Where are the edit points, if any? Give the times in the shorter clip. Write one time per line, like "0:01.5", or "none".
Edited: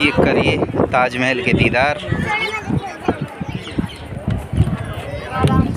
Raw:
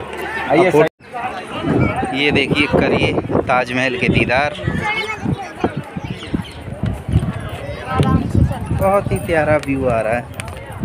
none